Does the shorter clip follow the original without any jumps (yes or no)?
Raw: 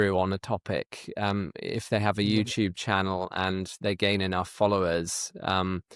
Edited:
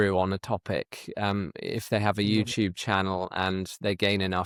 yes